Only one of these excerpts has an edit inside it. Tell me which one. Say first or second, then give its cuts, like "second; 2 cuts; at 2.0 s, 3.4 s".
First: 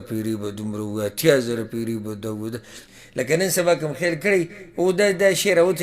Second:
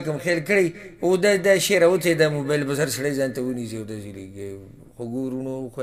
first; 1 cut; at 2.8 s